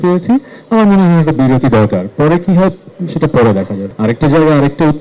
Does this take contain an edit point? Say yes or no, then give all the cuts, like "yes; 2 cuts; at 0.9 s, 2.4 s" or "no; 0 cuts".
yes; 1 cut; at 3.8 s